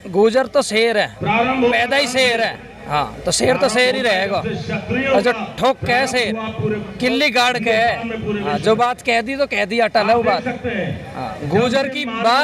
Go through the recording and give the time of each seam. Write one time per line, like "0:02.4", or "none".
none

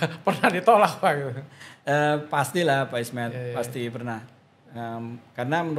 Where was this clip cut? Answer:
none

